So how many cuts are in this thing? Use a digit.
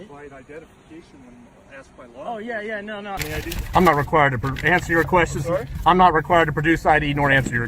1